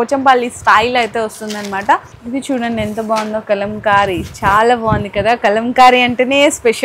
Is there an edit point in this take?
yes; 1 cut; at 2.2 s

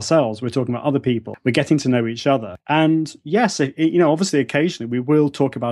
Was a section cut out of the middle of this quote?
yes; 2 cuts; at 1.3 s, 2.5 s

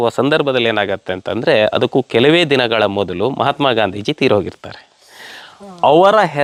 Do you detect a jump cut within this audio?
no; 0 cuts

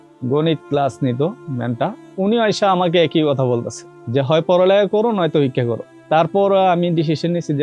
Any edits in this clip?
no; 0 cuts

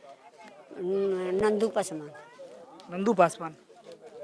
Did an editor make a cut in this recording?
no; 0 cuts

